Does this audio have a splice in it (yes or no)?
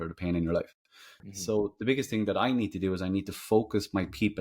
no